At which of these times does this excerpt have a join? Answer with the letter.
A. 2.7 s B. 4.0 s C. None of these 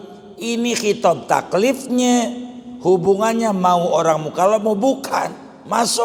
C